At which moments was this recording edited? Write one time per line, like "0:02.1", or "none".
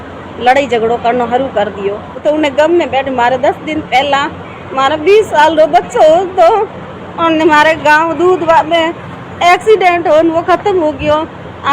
0:02.2